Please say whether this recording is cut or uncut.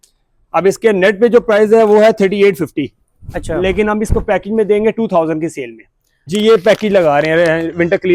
cut